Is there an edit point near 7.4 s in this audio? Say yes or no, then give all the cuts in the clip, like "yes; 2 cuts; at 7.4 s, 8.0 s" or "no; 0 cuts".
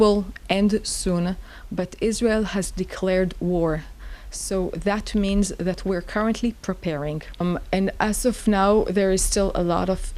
yes; 1 cut; at 7.4 s